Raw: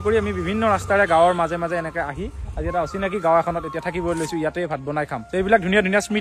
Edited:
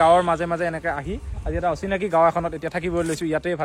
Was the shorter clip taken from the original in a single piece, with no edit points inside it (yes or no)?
yes